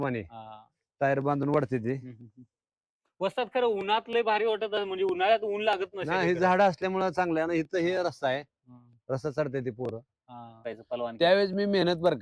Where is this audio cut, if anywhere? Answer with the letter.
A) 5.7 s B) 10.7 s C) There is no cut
B